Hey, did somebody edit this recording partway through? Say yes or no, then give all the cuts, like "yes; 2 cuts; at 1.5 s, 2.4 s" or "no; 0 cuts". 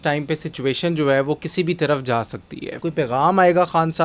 yes; 1 cut; at 2.8 s